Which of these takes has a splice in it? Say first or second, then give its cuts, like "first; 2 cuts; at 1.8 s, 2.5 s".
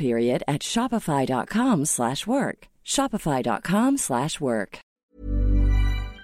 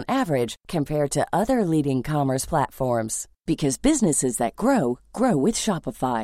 first; 1 cut; at 5.1 s